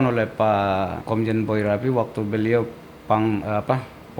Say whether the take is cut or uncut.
cut